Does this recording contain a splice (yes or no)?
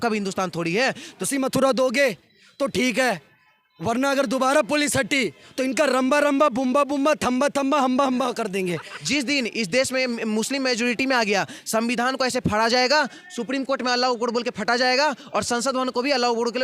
yes